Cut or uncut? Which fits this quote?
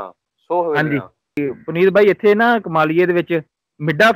cut